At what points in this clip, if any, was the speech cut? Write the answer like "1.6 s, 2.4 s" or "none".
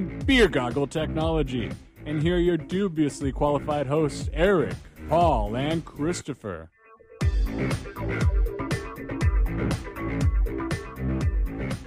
10.7 s